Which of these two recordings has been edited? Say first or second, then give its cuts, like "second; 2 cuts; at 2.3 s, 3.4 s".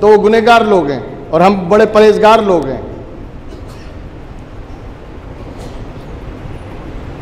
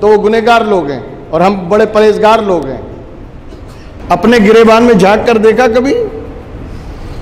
second; 1 cut; at 4.0 s